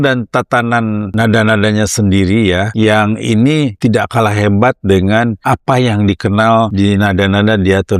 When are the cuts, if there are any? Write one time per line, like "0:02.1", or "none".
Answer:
0:01.1
0:02.7
0:03.7
0:05.4
0:06.7